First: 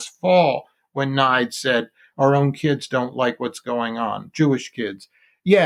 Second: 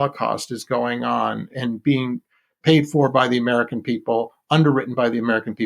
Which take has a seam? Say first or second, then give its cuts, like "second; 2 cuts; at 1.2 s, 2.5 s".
second; 1 cut; at 1.5 s